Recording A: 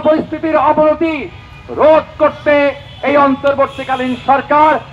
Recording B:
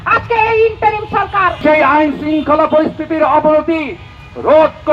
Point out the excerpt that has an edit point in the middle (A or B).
B